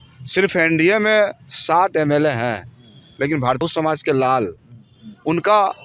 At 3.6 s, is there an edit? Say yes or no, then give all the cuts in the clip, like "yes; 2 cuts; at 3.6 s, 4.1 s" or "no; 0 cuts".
yes; 1 cut; at 3.6 s